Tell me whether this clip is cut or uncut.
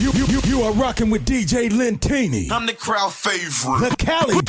uncut